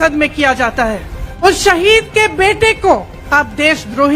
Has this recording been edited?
yes; 2 cuts; at 1.4 s, 3.1 s

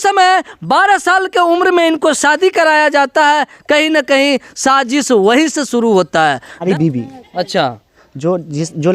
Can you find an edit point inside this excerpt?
yes; 1 cut; at 6.6 s

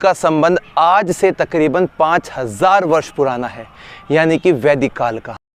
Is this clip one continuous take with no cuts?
yes; 0 cuts

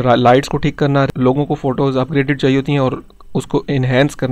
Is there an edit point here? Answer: yes; 1 cut; at 1.1 s

